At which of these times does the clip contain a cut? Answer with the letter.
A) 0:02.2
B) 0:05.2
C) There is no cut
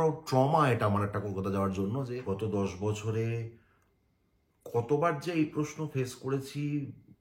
A